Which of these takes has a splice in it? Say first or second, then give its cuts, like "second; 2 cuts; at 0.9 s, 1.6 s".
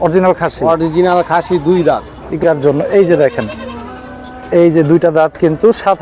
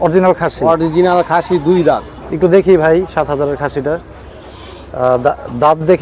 first; 1 cut; at 2.4 s